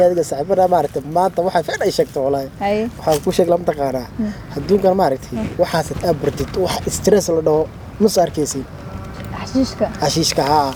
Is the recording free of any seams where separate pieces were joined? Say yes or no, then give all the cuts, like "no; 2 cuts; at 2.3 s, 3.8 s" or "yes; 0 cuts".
yes; 0 cuts